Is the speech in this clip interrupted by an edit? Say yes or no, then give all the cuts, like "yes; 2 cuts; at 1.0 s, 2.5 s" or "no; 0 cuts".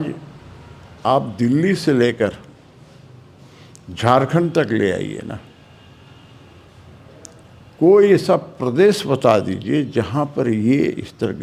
no; 0 cuts